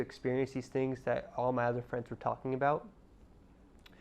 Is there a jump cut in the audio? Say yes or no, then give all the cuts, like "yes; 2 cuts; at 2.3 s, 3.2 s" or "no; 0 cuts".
no; 0 cuts